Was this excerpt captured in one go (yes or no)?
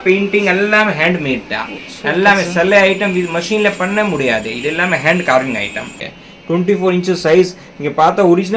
no